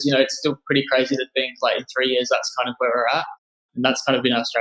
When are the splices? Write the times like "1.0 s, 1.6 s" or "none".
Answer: 3.6 s